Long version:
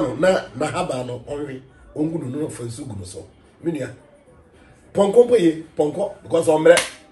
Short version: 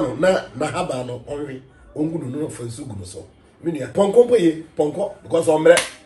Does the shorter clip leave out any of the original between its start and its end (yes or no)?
yes